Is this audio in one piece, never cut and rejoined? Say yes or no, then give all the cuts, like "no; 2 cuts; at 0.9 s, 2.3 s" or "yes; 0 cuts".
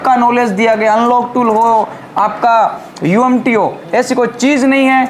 yes; 0 cuts